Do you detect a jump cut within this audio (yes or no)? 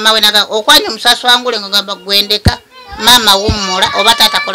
no